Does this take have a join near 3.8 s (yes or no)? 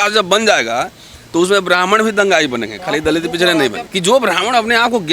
yes